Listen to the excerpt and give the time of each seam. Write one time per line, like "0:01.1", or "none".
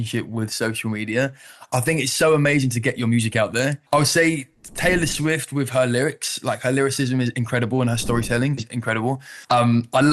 0:03.8